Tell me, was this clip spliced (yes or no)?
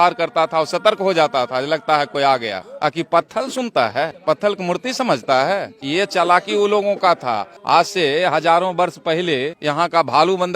yes